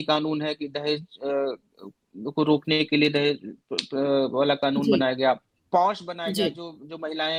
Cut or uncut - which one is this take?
uncut